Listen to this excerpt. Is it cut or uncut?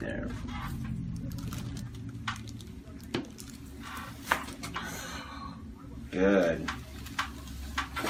uncut